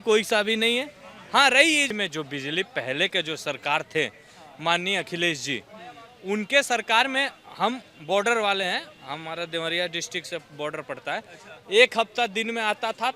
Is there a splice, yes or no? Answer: yes